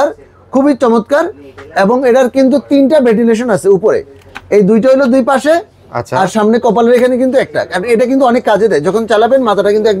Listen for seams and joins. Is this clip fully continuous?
yes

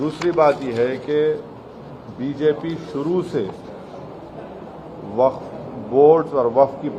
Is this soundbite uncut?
yes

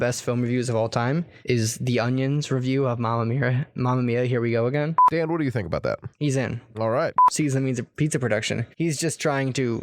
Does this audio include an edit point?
yes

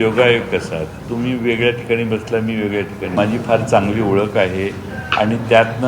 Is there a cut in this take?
yes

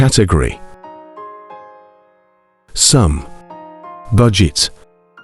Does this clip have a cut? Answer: no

